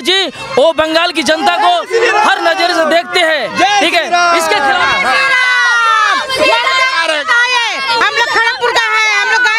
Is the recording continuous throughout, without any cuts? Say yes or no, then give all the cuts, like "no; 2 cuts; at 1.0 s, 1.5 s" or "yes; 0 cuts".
yes; 0 cuts